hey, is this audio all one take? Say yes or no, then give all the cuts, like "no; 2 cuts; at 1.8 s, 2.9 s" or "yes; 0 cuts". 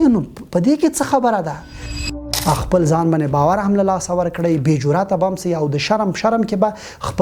no; 1 cut; at 2.0 s